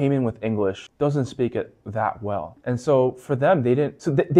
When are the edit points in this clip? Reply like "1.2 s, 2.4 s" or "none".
0.8 s, 2.5 s